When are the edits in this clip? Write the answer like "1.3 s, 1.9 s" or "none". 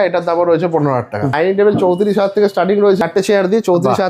1.3 s, 3.0 s

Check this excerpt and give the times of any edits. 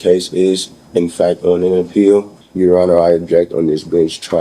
2.4 s

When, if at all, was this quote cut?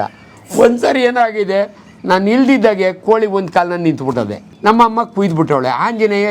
4.4 s

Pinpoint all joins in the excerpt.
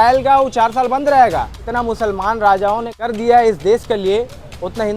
1.7 s, 2.9 s

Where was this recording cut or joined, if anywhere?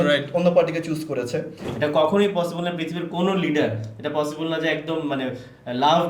1.6 s

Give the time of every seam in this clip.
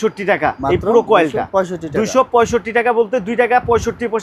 none

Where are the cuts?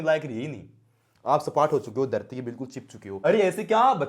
3.1 s

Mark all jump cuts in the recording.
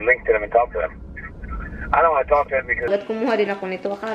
2.9 s

